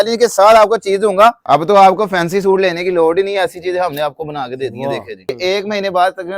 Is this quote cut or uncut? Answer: cut